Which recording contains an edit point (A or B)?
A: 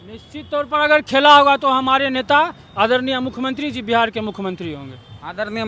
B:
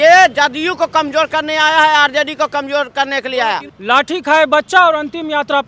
B